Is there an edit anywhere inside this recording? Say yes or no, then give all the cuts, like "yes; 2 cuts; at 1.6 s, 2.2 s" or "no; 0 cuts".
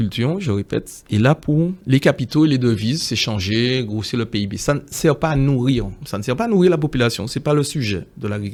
no; 0 cuts